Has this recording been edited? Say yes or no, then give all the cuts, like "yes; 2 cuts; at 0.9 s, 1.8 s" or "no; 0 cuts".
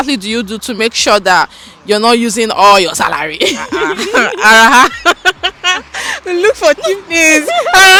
no; 0 cuts